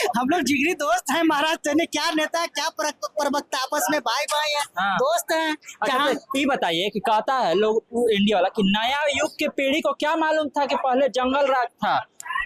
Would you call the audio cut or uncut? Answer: uncut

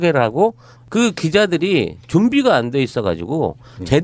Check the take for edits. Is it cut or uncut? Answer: cut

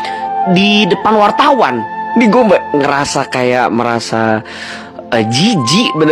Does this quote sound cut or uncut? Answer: uncut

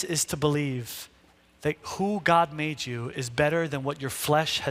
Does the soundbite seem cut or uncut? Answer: uncut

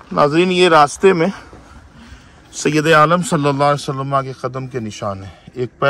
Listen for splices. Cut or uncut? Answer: uncut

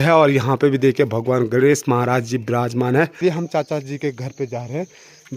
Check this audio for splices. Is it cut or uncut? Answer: cut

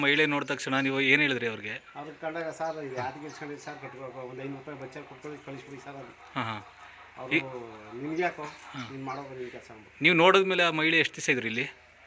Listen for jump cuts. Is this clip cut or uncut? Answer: cut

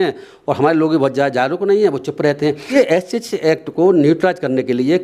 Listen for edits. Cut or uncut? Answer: cut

